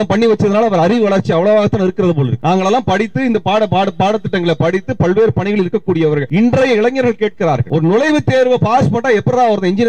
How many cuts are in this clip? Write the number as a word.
three